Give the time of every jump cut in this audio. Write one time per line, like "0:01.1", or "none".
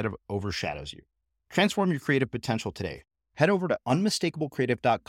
none